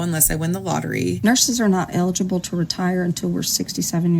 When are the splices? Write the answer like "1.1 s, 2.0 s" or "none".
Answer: 1.2 s